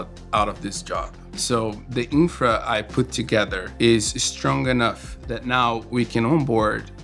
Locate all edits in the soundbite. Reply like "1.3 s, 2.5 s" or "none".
none